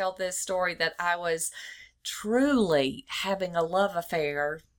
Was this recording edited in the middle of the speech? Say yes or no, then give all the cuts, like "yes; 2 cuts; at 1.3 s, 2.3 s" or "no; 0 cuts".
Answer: no; 0 cuts